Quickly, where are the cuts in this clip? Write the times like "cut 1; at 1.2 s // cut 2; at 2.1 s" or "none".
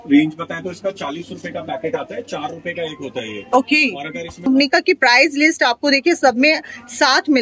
cut 1; at 4.5 s